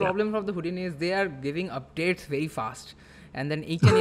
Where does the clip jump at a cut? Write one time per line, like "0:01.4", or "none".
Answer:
none

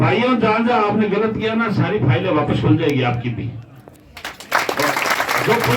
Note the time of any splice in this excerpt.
none

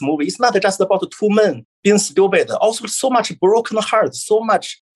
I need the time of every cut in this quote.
0:01.1

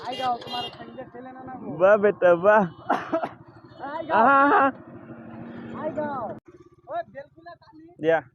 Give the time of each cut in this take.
0:06.4

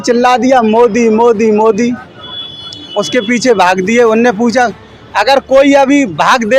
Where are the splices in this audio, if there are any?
none

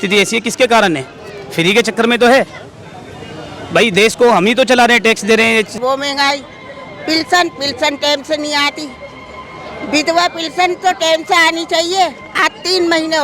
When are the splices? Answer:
0:05.7

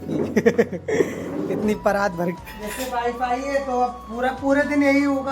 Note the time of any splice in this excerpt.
0:02.4

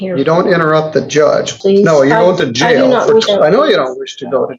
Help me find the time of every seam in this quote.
0:01.5
0:03.2

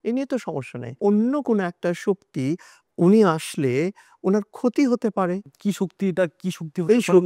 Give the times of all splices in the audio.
0:00.9
0:02.7

